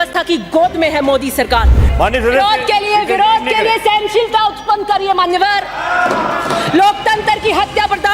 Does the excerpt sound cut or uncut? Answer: cut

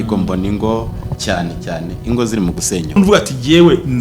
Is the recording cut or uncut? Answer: cut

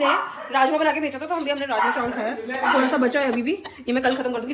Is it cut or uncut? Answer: uncut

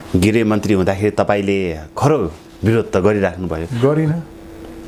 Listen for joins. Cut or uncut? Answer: uncut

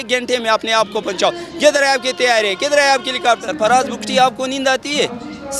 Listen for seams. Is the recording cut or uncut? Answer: cut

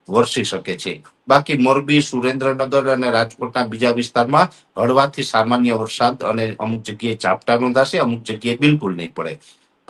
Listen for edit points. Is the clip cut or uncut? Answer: uncut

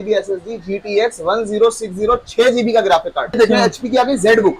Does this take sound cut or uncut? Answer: cut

